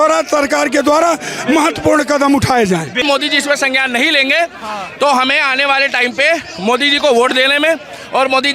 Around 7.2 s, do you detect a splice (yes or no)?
no